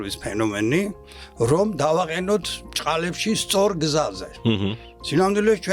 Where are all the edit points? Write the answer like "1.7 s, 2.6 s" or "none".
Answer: none